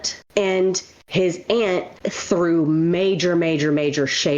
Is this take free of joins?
yes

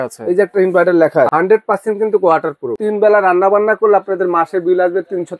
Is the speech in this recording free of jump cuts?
no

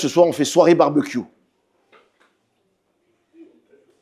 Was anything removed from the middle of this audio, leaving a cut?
no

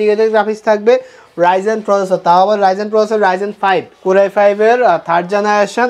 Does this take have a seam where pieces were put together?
yes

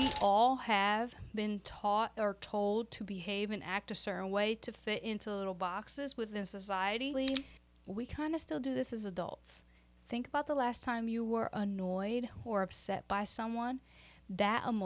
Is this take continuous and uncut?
no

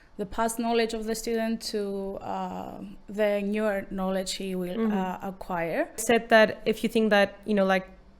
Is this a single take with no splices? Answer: no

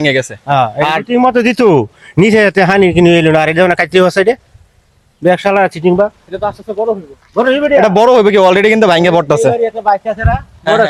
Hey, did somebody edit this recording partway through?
no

